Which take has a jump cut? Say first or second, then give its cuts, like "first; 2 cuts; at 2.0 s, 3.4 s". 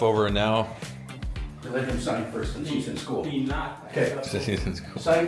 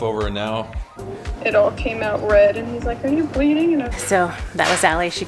second; 2 cuts; at 1.2 s, 3.9 s